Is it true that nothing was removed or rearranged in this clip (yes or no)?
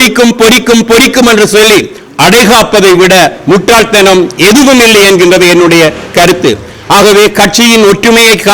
yes